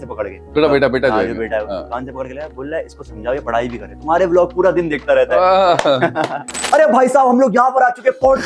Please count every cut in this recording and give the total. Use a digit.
1